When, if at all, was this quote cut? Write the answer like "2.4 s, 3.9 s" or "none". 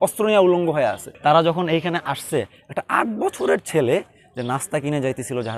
1.1 s